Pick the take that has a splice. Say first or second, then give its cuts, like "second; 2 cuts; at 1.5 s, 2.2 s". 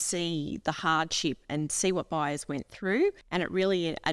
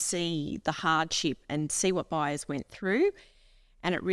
first; 1 cut; at 3.2 s